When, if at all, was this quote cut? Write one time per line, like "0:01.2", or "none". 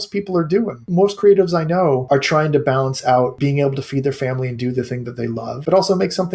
0:00.9
0:02.0
0:03.3
0:05.5